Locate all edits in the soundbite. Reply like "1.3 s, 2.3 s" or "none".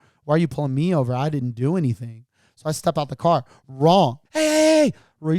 4.2 s